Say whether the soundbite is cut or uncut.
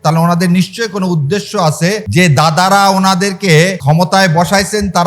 cut